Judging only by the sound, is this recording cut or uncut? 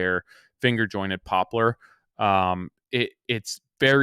uncut